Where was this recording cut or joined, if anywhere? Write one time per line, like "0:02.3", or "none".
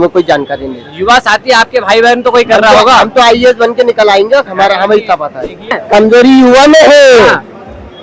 0:05.8